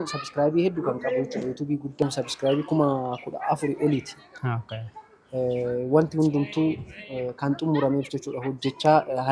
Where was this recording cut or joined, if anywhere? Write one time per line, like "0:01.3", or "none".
0:02.0